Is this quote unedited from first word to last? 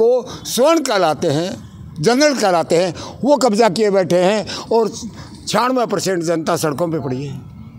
yes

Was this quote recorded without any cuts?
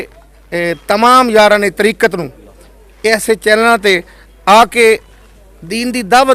yes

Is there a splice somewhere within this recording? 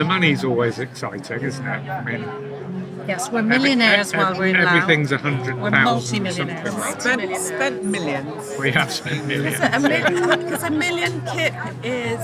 no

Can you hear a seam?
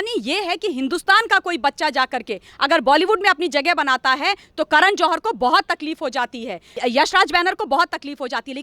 no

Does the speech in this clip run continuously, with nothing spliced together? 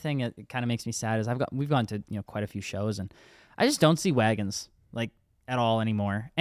yes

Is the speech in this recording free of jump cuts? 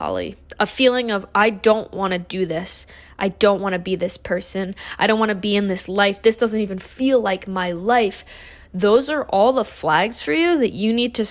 yes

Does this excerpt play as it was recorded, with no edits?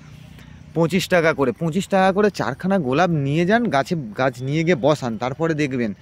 yes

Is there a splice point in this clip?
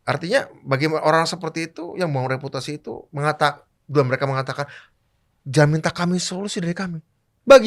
no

